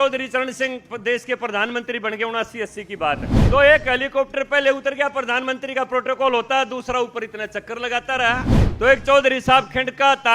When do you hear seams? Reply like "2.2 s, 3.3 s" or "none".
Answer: 3.3 s, 8.6 s